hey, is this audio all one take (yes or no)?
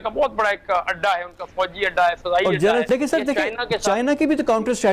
no